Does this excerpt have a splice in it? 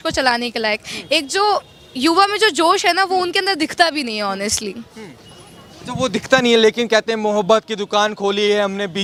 no; 0 cuts

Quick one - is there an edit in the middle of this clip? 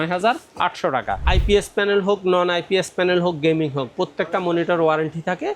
yes; 1 cut; at 1.2 s

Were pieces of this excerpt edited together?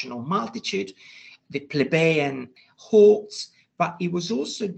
no; 0 cuts

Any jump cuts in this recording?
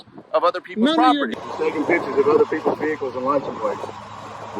yes; 1 cut; at 1.3 s

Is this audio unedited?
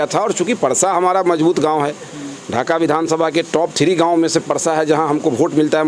yes; 0 cuts

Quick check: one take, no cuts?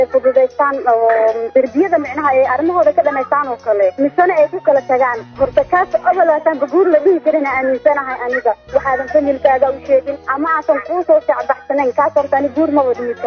no; 3 cuts; at 1.4 s, 3.9 s, 10.2 s

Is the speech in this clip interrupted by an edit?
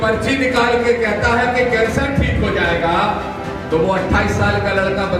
no; 0 cuts

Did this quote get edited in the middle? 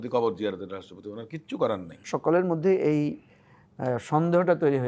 yes; 1 cut; at 2.0 s

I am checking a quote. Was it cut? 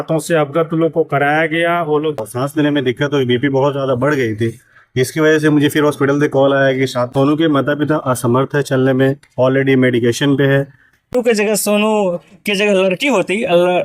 yes; 3 cuts; at 2.2 s, 7.1 s, 11.1 s

